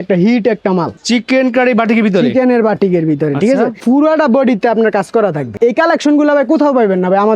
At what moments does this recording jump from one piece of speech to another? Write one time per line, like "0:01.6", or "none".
0:01.0
0:03.8
0:05.5